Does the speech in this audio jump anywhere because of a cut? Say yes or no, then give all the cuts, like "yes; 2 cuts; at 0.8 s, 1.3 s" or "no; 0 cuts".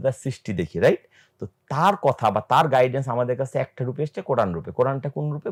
no; 0 cuts